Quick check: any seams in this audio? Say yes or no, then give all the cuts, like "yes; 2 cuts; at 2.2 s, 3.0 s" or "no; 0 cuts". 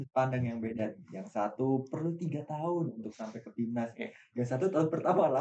no; 0 cuts